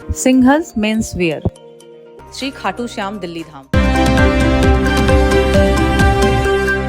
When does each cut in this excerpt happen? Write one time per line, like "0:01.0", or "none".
0:03.6